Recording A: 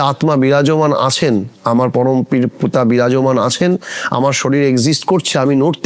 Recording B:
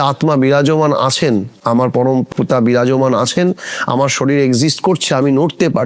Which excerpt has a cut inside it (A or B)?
B